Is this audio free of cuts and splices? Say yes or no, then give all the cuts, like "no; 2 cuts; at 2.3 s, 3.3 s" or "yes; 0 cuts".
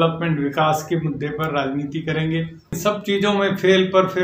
no; 1 cut; at 2.8 s